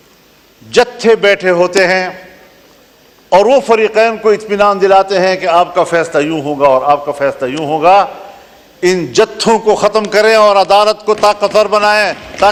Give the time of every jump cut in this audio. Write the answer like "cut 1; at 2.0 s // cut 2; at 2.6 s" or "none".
none